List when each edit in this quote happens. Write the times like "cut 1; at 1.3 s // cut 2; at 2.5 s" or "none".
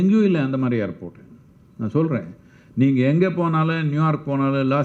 none